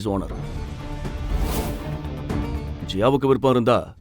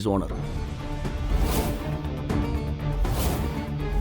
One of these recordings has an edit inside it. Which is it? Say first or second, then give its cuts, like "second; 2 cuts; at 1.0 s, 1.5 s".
first; 1 cut; at 2.8 s